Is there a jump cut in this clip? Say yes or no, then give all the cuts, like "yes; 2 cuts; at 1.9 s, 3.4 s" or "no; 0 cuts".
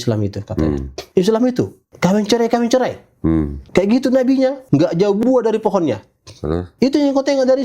yes; 5 cuts; at 0.9 s, 1.8 s, 3.6 s, 4.6 s, 6.7 s